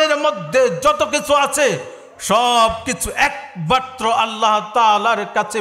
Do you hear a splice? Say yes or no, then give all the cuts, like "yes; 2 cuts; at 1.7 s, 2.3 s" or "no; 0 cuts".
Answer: no; 0 cuts